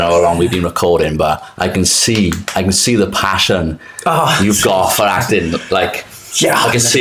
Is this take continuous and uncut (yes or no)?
yes